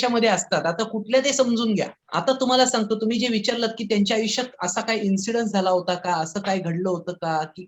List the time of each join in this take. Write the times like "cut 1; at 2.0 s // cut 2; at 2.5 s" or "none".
cut 1; at 2.0 s